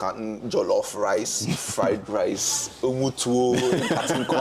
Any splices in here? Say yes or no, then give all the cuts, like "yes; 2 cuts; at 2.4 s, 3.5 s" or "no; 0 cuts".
no; 0 cuts